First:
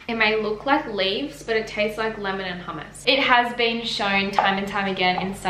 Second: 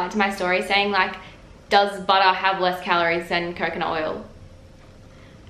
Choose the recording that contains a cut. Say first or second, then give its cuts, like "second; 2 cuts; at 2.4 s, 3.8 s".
first; 1 cut; at 3.0 s